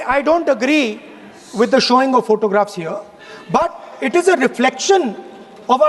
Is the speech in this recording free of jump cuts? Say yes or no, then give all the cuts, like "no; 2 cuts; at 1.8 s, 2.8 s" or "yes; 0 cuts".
yes; 0 cuts